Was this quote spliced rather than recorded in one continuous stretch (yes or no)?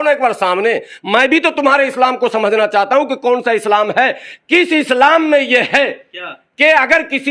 no